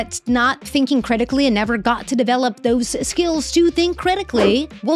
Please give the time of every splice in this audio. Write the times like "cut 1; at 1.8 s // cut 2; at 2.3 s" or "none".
none